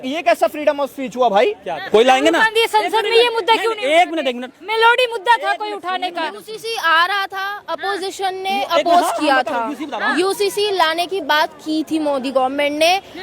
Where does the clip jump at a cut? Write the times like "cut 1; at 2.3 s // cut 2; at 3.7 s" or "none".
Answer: cut 1; at 1.8 s

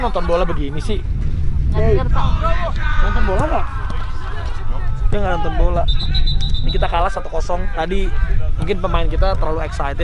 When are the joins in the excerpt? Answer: none

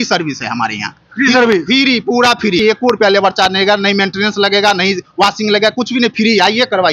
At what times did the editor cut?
cut 1; at 2.6 s

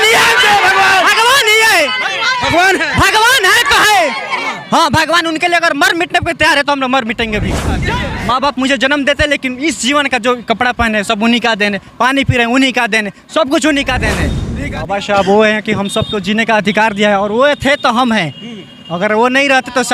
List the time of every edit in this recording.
cut 1; at 7.8 s // cut 2; at 14.4 s

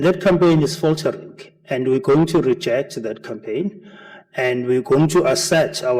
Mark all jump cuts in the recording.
cut 1; at 4.0 s

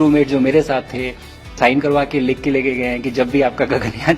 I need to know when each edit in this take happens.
cut 1; at 1.5 s

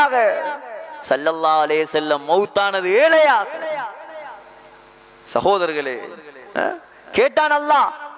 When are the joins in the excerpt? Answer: none

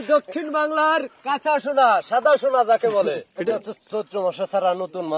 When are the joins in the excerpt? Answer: cut 1; at 3.3 s

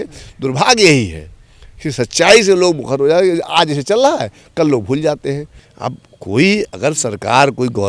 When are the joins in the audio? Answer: cut 1; at 5.5 s

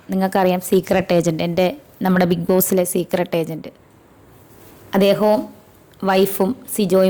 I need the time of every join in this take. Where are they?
none

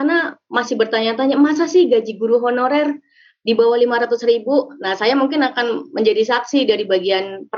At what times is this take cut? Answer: none

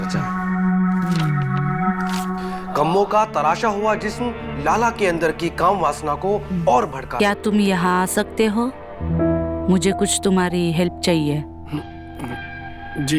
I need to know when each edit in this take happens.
cut 1; at 7.1 s

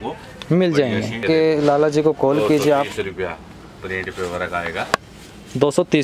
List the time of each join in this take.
cut 1; at 1.2 s

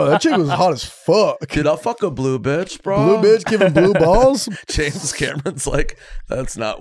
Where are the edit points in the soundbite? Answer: cut 1; at 4.5 s

